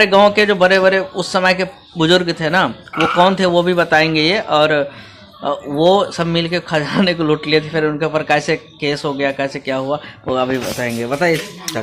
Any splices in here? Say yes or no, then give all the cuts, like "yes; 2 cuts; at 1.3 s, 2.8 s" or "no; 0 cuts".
no; 0 cuts